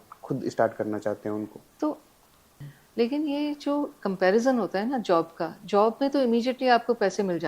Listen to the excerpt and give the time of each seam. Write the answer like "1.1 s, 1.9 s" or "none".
2.7 s